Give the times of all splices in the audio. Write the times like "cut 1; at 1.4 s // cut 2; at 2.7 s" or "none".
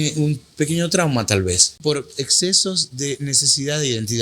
cut 1; at 1.7 s